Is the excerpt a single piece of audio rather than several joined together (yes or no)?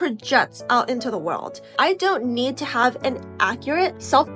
no